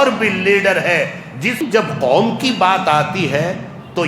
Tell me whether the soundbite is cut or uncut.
uncut